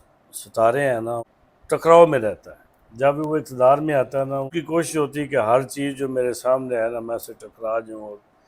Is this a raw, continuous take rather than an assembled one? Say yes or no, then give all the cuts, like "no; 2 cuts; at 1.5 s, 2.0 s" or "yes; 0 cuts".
no; 2 cuts; at 1.3 s, 4.5 s